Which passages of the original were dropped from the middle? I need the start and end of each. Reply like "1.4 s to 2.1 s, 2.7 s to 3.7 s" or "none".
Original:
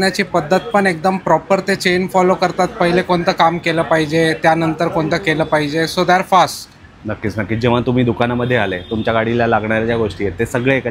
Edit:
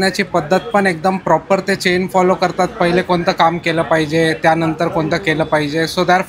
none